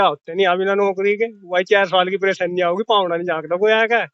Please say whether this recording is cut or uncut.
uncut